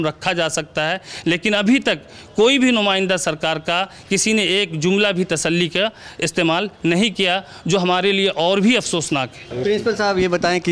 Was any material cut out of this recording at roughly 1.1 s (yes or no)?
no